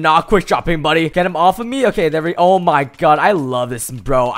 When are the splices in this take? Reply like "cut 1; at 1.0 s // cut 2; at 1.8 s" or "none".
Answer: cut 1; at 1.1 s